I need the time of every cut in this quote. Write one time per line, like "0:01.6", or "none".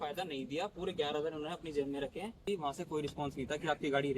0:02.5